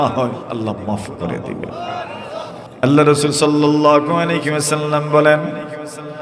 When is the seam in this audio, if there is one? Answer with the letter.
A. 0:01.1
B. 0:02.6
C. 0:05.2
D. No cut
B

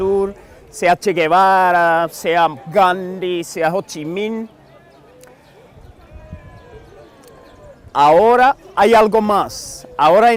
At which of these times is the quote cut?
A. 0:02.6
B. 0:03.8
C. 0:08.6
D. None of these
D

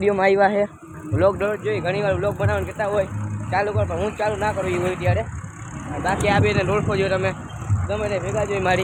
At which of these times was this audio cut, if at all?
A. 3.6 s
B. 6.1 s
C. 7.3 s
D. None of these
D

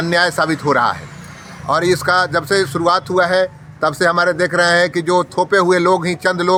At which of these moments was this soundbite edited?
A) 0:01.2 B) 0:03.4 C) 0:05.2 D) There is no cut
D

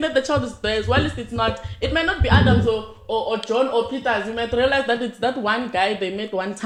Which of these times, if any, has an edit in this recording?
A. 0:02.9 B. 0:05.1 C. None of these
C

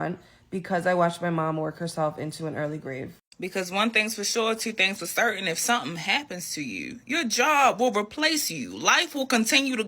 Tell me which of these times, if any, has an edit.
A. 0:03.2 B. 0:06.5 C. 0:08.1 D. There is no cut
A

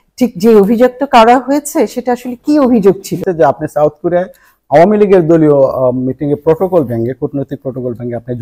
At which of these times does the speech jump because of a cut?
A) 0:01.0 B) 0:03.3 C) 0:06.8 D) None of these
B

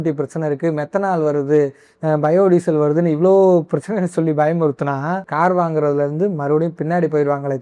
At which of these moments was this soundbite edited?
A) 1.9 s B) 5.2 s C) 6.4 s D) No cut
D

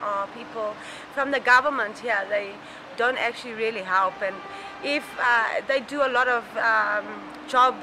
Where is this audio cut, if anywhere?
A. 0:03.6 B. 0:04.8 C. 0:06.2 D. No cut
D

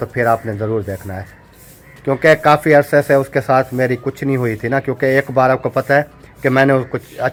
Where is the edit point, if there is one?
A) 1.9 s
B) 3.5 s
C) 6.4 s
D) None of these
D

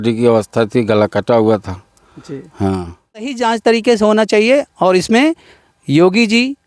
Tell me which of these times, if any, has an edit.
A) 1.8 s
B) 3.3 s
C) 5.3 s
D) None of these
B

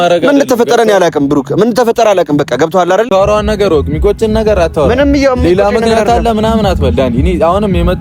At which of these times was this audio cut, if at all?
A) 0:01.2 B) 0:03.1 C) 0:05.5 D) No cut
B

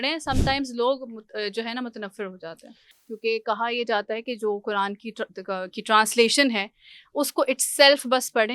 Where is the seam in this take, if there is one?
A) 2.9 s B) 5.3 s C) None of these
A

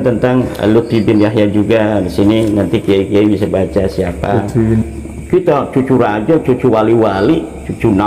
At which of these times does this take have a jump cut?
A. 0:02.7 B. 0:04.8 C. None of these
B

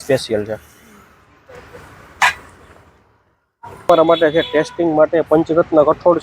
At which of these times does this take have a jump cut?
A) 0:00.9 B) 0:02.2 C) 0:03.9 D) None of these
C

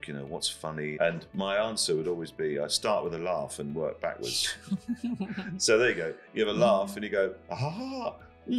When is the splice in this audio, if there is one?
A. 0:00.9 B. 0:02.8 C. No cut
A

